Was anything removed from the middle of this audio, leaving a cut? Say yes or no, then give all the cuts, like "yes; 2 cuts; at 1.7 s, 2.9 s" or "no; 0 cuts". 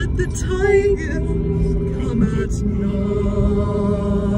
no; 0 cuts